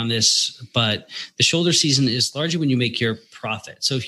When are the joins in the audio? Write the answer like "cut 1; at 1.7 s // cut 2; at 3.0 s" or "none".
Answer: none